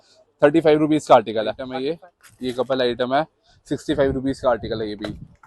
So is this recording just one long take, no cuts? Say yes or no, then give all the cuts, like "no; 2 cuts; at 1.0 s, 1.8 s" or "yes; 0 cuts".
no; 1 cut; at 1.7 s